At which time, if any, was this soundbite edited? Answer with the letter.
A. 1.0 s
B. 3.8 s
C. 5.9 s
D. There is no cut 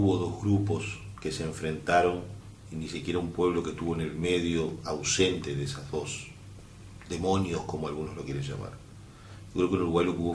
B